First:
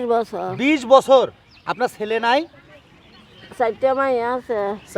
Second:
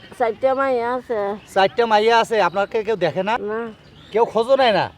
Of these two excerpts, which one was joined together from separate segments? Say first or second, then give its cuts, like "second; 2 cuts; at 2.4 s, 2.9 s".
second; 1 cut; at 3.4 s